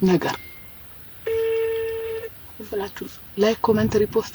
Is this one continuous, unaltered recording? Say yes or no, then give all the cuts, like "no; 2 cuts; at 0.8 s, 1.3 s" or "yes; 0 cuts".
yes; 0 cuts